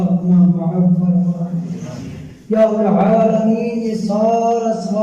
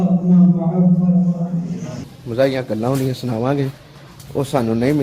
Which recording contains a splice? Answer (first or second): second